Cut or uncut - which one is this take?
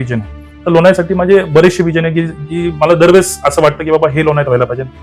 uncut